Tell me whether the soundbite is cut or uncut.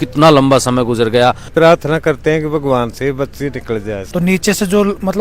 cut